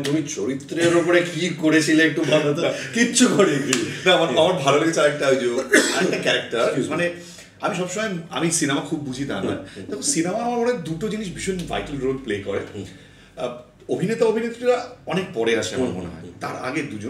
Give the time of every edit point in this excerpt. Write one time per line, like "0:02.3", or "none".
none